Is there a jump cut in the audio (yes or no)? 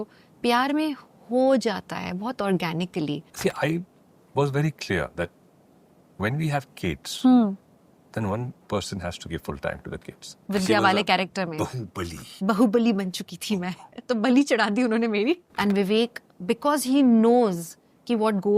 yes